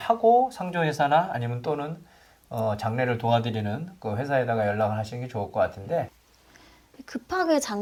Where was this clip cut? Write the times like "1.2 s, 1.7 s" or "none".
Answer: none